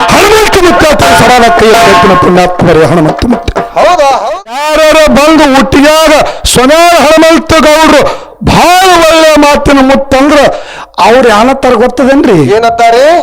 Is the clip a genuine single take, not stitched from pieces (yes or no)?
no